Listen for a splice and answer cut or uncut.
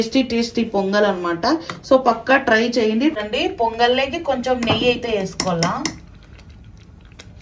cut